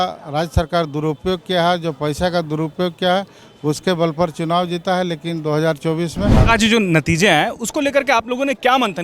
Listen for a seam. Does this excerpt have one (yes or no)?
yes